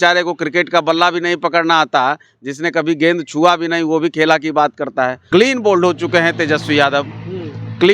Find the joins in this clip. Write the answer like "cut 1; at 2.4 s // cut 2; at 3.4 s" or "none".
cut 1; at 5.2 s